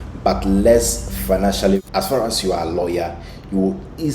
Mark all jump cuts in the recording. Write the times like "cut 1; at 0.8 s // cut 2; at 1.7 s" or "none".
cut 1; at 1.8 s